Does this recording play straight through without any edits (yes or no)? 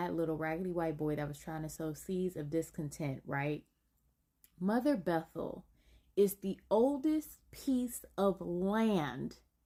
yes